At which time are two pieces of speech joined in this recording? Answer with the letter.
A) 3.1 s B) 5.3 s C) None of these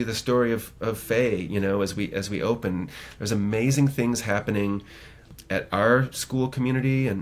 B